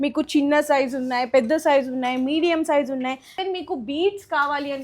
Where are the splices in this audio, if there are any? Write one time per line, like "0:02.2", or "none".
0:03.3